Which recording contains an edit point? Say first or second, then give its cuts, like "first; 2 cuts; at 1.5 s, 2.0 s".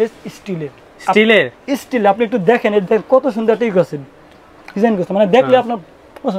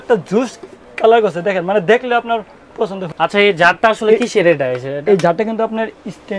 second; 1 cut; at 3.0 s